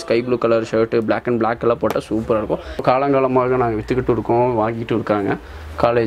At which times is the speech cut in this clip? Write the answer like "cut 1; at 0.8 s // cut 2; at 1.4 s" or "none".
cut 1; at 2.8 s